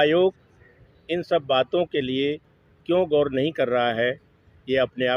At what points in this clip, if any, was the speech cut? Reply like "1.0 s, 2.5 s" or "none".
none